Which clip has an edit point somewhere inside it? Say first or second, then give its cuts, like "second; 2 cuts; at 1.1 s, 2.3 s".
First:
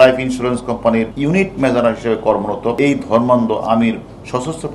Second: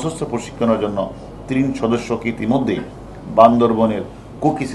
first; 2 cuts; at 1.1 s, 2.8 s